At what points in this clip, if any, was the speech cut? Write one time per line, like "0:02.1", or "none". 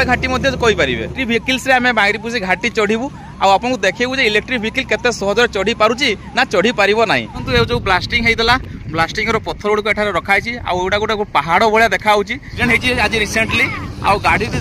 0:01.2
0:07.5
0:12.5